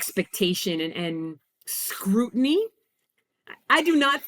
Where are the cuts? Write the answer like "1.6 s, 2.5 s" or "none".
none